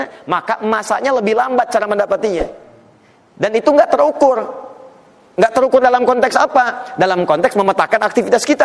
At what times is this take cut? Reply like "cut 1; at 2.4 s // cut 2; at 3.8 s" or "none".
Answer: none